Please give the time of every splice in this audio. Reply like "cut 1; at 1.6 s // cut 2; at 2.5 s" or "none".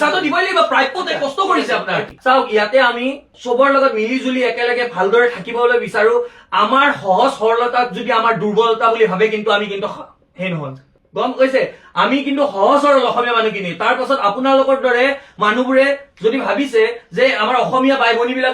cut 1; at 2.1 s